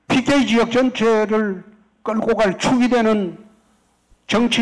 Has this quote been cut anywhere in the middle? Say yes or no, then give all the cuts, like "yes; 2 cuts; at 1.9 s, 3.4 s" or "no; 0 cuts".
no; 0 cuts